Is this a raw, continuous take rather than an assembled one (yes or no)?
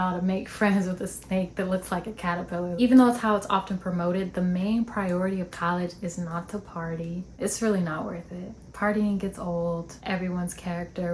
no